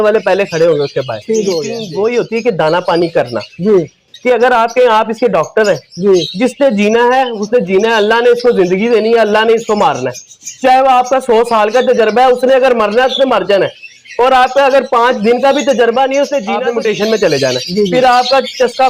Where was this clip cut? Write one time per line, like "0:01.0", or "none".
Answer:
0:01.8
0:16.5